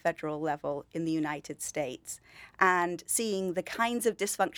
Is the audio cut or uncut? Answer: uncut